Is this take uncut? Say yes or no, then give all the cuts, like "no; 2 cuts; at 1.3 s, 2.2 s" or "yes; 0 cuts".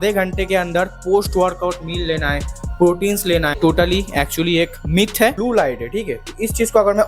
no; 2 cuts; at 3.5 s, 5.4 s